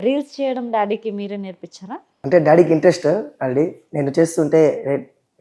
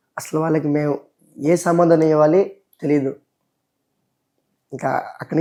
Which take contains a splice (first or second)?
first